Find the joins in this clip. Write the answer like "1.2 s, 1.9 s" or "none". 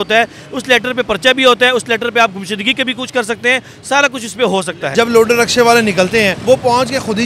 4.9 s, 6.4 s